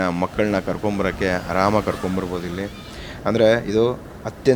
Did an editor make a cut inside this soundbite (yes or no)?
no